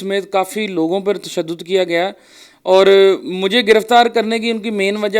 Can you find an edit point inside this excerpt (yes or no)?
no